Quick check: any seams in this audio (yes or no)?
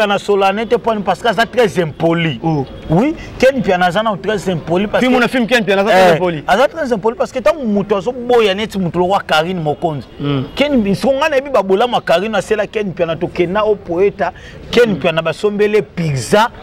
no